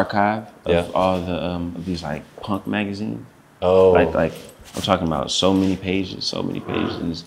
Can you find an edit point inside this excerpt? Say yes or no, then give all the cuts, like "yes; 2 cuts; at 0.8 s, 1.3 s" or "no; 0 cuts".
no; 0 cuts